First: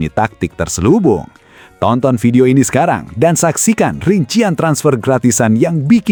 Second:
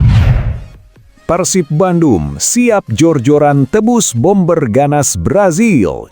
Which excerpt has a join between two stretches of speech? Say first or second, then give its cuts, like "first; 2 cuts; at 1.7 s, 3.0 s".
second; 1 cut; at 1.1 s